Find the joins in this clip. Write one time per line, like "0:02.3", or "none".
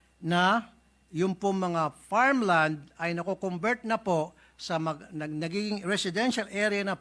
none